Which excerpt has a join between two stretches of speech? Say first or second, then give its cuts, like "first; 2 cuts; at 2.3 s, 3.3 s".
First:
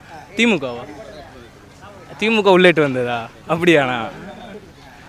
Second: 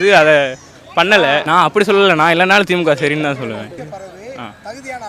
second; 2 cuts; at 1.4 s, 3.8 s